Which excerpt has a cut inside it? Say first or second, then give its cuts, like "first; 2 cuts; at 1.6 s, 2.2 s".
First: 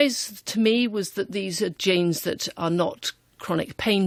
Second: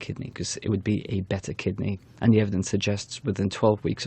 second; 1 cut; at 2.0 s